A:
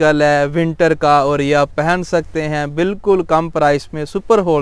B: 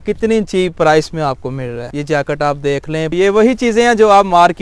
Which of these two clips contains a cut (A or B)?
B